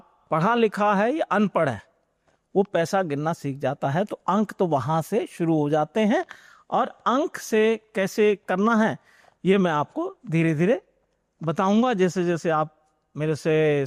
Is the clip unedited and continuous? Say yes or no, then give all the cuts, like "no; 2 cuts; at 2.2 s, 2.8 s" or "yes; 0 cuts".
yes; 0 cuts